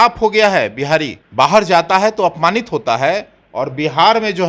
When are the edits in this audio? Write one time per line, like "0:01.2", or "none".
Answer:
0:01.2

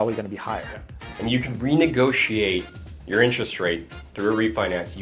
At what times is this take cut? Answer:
0:01.1

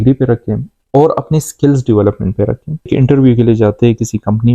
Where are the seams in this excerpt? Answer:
0:02.9

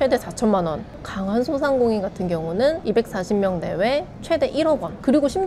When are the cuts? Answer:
none

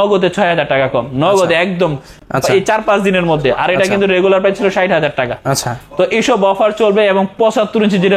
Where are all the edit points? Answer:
none

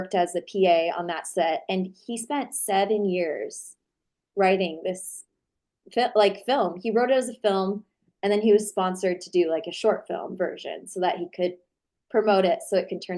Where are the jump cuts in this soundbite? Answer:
none

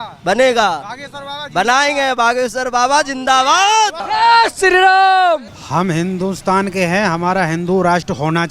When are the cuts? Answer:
0:04.0
0:05.6

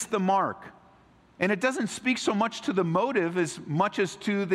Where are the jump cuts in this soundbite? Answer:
none

